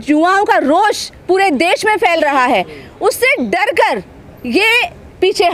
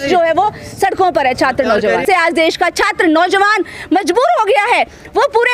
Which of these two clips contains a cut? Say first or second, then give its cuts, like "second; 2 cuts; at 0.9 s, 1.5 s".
second; 1 cut; at 2.0 s